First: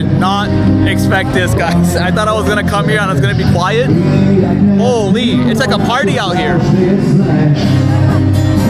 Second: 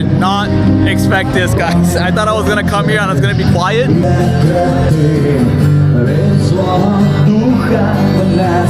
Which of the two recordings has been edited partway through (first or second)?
second